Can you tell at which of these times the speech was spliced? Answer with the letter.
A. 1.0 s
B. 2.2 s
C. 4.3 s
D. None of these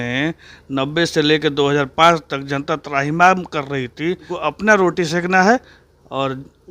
C